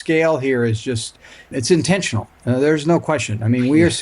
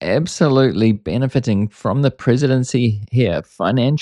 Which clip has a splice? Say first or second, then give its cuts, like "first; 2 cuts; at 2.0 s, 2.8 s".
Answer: first; 1 cut; at 1.5 s